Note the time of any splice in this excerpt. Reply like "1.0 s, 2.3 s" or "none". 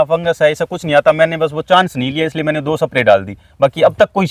none